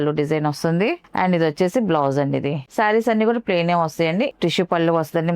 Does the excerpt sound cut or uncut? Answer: cut